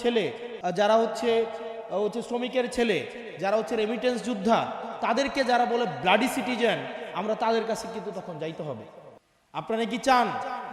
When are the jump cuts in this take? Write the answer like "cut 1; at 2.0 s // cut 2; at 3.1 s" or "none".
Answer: none